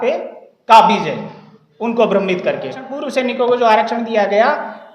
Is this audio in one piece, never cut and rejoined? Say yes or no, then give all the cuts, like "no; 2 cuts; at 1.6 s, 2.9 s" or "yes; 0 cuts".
no; 1 cut; at 2.9 s